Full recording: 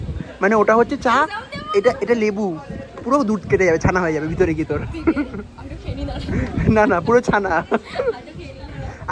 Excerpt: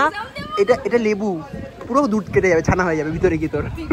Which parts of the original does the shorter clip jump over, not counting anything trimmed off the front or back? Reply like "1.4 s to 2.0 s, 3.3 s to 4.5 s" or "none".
none